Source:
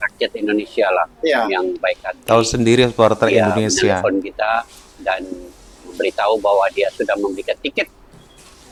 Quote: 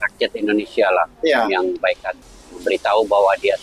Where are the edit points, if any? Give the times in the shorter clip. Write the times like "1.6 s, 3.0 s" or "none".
2.1 s

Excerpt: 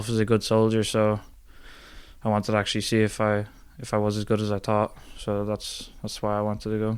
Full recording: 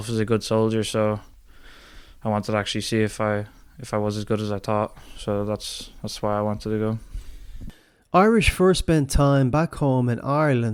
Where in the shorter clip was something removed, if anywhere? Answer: none

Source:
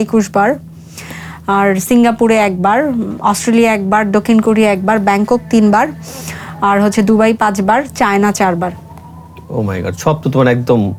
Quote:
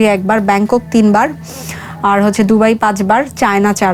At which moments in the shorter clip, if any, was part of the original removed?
none

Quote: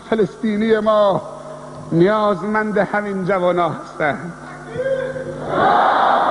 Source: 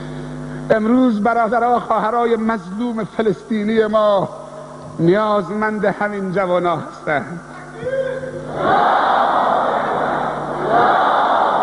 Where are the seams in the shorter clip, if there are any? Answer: none

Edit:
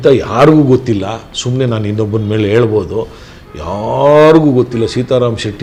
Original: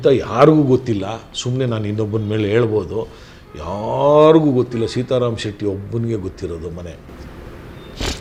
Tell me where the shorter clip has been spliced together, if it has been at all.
none

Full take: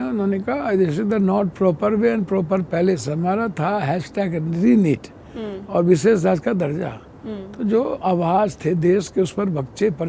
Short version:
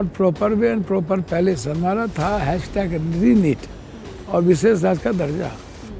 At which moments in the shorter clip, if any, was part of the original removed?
none

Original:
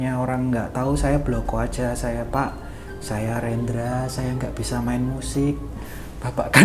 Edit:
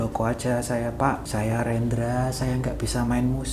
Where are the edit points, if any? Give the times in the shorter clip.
1.2 s

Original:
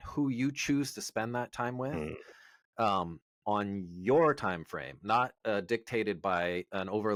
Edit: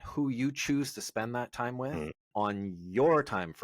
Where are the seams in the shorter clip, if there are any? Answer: 2.2 s

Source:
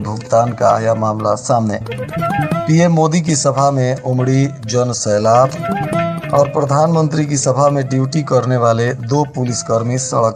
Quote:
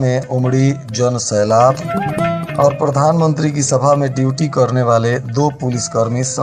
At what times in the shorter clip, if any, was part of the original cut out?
none

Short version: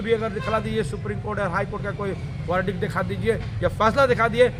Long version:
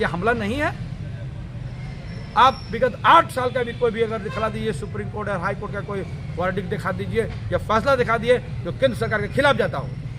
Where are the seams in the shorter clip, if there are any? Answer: none

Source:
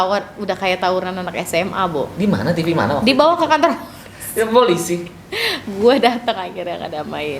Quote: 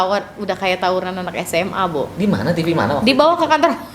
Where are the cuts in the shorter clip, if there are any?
none

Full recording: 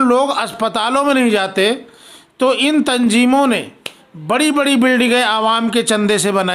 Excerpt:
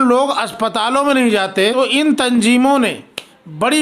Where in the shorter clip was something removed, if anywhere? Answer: 1.7 s

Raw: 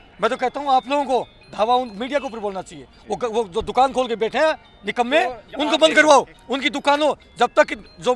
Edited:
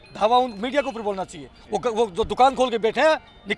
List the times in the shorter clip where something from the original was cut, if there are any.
none

